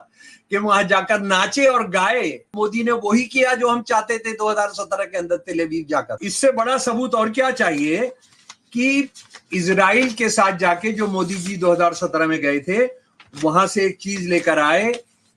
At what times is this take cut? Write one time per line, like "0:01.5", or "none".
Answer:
0:02.5
0:06.2